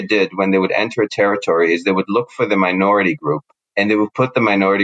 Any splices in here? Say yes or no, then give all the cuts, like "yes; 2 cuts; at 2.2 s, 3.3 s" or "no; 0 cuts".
yes; 1 cut; at 3.6 s